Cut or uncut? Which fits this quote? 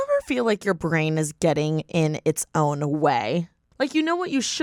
uncut